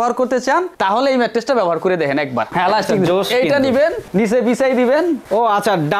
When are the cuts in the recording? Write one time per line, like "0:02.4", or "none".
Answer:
0:02.5